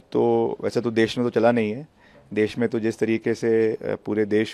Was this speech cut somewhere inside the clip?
no; 0 cuts

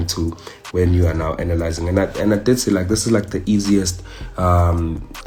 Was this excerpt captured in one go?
yes; 0 cuts

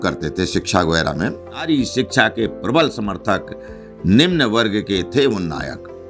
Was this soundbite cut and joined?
yes; 1 cut; at 1.7 s

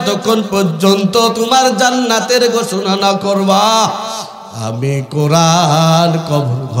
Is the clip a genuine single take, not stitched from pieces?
yes; 0 cuts

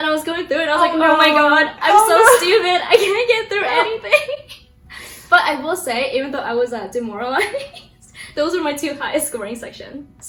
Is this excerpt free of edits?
yes; 0 cuts

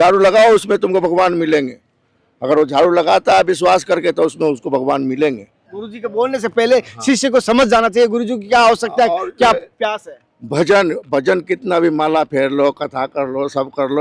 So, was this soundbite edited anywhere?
no; 0 cuts

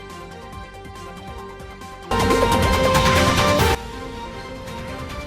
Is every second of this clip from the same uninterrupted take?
yes; 0 cuts

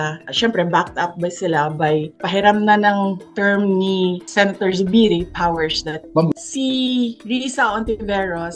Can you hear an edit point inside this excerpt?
yes; 1 cut; at 6.3 s

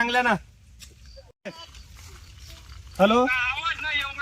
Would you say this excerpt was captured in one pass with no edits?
no; 1 cut; at 1.4 s

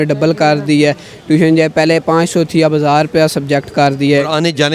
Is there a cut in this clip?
no; 0 cuts

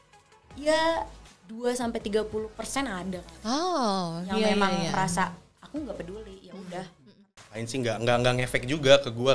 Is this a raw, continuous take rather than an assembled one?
no; 1 cut; at 7.0 s

